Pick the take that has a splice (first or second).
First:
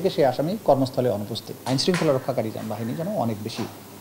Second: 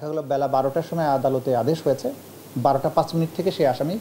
first